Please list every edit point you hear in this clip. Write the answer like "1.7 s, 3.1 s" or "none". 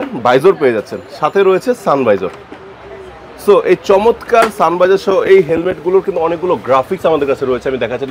none